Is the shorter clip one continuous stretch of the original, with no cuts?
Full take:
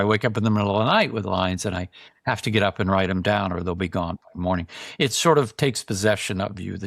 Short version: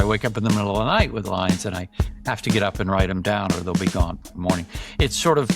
yes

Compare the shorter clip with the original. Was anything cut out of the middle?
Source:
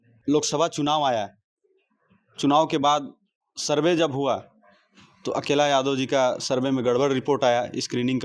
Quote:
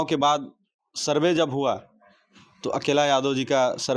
no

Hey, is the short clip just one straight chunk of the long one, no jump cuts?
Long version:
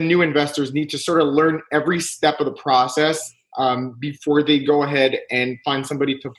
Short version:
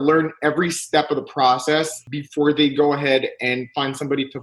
no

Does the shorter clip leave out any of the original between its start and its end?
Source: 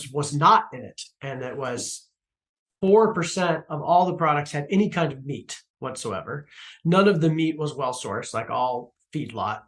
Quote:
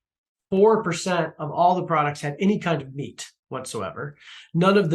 no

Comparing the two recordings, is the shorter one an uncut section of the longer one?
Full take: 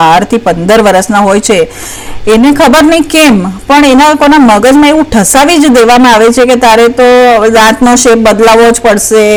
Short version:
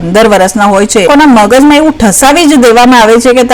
no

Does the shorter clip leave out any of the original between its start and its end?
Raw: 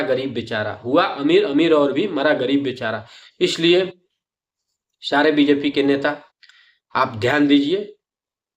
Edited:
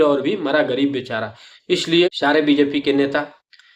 yes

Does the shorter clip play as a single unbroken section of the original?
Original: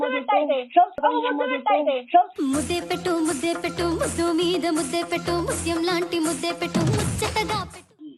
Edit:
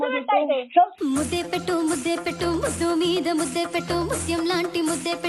no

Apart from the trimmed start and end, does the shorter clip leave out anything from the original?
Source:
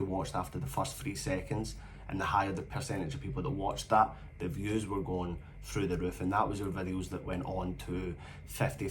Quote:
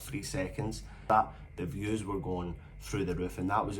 yes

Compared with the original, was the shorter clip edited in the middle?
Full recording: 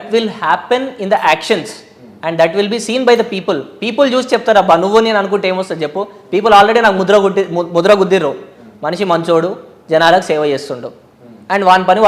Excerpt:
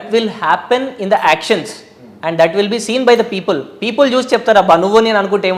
no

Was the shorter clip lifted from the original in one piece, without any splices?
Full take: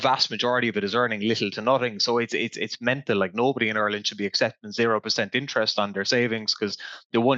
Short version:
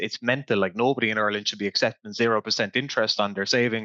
yes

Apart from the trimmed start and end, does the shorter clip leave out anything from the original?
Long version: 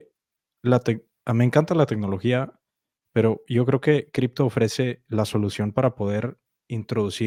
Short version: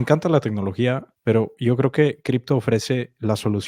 yes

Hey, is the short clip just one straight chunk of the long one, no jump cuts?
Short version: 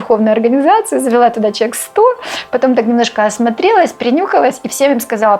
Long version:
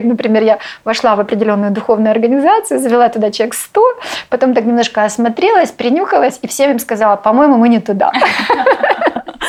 yes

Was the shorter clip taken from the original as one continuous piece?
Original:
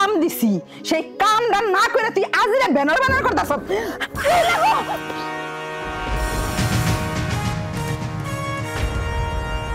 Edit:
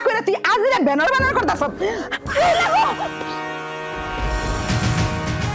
yes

